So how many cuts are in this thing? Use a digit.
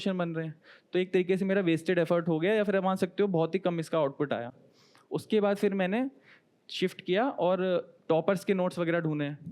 0